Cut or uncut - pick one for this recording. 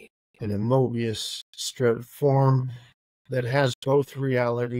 uncut